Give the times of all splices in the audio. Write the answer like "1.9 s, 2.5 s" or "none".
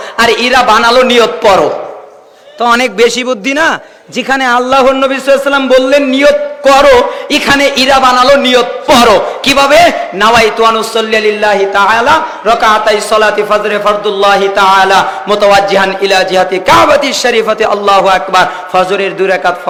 none